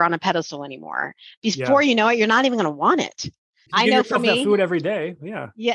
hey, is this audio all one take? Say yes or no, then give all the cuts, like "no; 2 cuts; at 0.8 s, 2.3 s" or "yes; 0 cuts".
yes; 0 cuts